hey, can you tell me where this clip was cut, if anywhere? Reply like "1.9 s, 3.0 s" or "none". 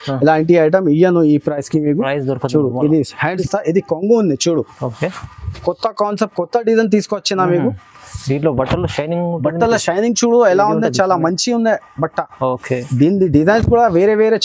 3.4 s